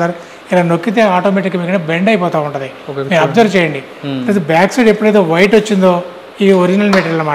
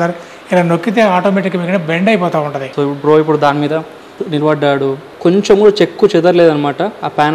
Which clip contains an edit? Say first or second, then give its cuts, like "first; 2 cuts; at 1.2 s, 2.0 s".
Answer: second; 2 cuts; at 2.6 s, 5.1 s